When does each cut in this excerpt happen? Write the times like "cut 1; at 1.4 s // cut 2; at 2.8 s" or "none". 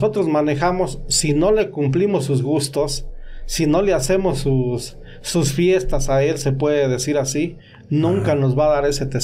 none